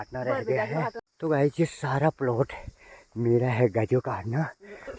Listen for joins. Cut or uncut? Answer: cut